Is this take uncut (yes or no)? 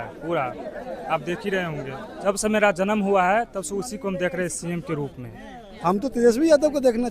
no